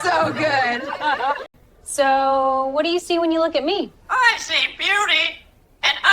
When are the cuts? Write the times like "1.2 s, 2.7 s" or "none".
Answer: 1.7 s